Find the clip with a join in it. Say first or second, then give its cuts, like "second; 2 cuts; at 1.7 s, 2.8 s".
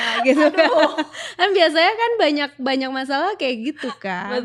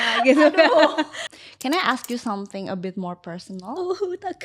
second; 1 cut; at 1.2 s